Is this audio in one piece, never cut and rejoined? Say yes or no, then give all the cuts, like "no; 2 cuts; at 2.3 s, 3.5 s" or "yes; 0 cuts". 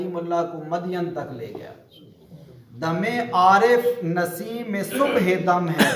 no; 1 cut; at 2.3 s